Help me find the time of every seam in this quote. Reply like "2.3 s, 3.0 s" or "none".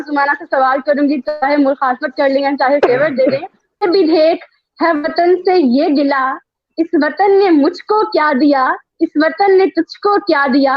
3.8 s